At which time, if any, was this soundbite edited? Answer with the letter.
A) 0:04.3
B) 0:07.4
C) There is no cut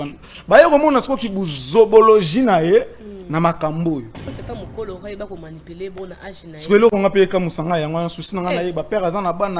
A